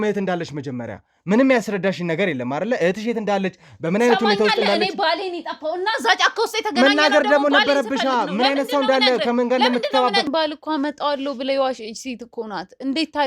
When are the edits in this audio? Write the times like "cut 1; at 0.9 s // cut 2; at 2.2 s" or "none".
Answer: cut 1; at 10.3 s